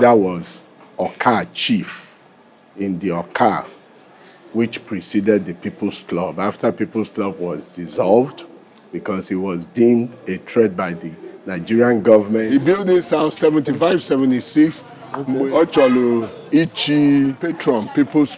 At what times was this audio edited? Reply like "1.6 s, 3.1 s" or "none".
12.5 s, 15.4 s, 17.5 s

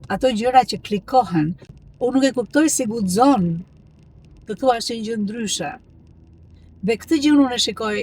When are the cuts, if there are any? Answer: 1.6 s

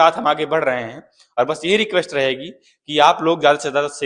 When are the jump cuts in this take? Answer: none

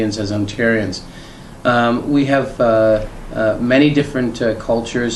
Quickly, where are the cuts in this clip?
1.4 s

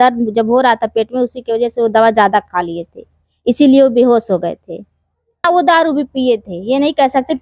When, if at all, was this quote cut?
5.4 s

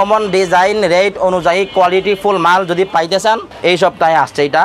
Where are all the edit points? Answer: 3.5 s

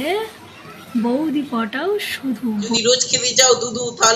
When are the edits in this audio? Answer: 2.8 s

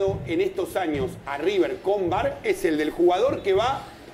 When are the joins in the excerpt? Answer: none

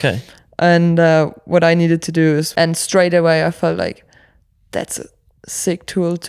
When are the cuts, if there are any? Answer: 2.5 s

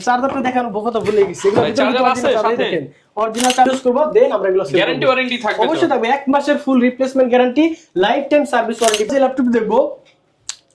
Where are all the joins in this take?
3.7 s, 9.1 s

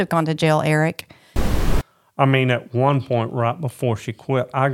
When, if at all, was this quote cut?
1.6 s

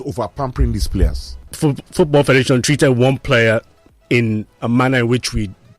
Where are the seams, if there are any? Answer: 1.5 s

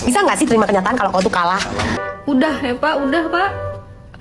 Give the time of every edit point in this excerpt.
1.9 s

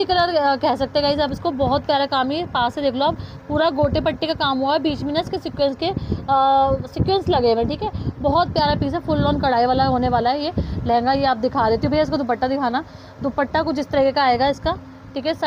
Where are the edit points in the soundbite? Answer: none

